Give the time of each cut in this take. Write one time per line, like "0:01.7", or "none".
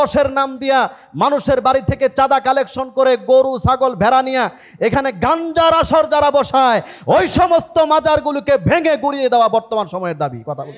none